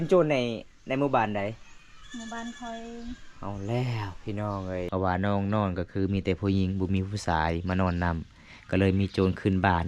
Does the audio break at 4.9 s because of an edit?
yes; 1 cut; at 4.9 s

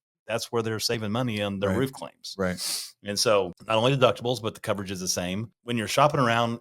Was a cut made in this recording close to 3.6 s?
yes; 2 cuts; at 3.6 s, 5.5 s

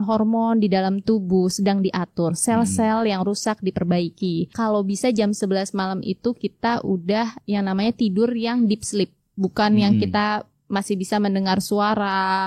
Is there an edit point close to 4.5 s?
yes; 1 cut; at 4.5 s

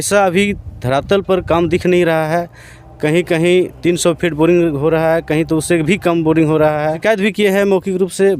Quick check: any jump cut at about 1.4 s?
no; 1 cut; at 7.0 s

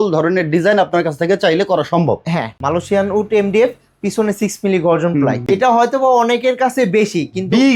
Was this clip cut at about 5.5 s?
yes; 2 cuts; at 2.6 s, 5.5 s

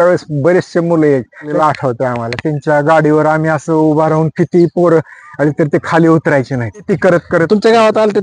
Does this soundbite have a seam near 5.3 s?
no; 2 cuts; at 1.5 s, 6.9 s

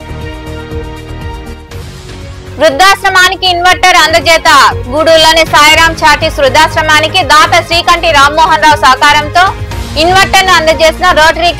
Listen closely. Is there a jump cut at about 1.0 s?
yes; 1 cut; at 1.0 s

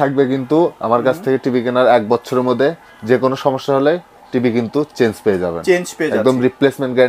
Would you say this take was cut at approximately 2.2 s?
no; 0 cuts

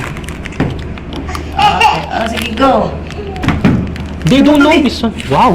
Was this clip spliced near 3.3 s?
yes; 1 cut; at 3.3 s

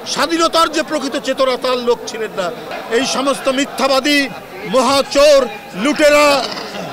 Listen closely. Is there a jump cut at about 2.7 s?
yes; 1 cut; at 2.7 s

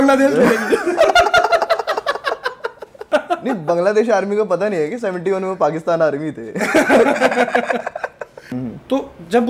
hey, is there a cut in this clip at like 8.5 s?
yes; 2 cuts; at 3.1 s, 8.5 s

